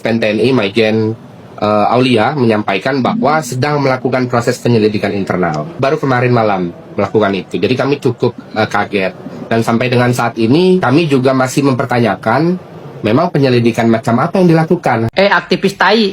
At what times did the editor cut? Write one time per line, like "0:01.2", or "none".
0:15.1